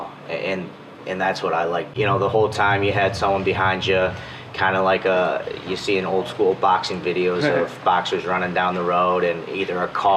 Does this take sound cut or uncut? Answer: cut